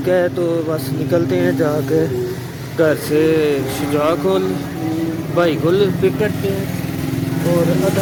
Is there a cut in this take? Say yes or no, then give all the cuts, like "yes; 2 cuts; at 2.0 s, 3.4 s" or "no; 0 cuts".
no; 0 cuts